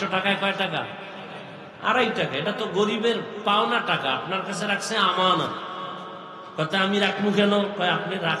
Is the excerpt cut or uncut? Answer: uncut